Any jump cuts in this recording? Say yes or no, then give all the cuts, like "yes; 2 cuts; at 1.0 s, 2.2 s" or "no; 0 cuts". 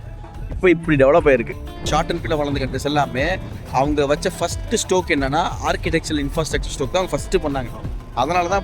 yes; 1 cut; at 1.8 s